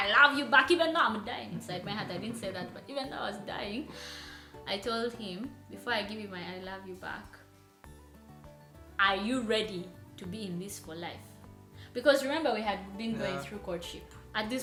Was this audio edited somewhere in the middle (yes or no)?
no